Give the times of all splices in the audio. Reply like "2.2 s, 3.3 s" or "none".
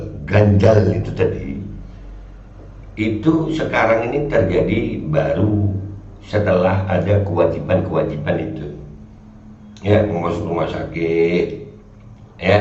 none